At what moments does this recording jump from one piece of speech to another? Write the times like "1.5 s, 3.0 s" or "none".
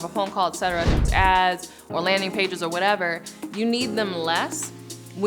1.0 s